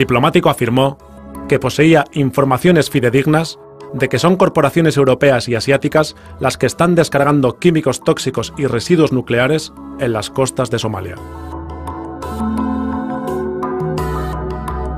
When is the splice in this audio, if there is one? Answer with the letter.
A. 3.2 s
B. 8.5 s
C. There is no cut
B